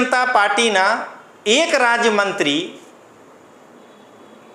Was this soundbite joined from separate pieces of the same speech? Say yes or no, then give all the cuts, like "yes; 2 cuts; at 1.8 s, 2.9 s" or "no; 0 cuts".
no; 0 cuts